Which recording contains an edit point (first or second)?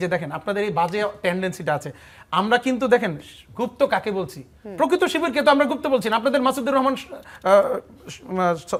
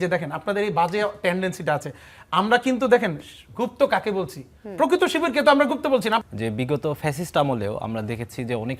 second